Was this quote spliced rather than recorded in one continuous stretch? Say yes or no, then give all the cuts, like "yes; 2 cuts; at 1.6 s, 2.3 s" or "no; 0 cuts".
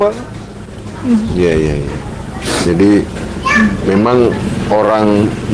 no; 0 cuts